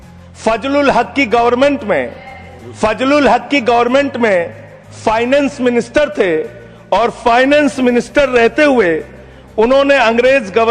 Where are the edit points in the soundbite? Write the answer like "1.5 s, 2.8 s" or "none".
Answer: none